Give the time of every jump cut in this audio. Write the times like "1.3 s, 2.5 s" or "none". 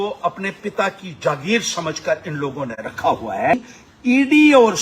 3.7 s